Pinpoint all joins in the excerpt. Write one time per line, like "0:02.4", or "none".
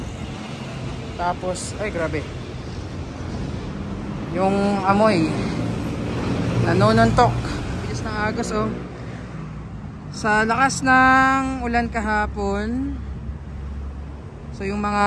0:08.0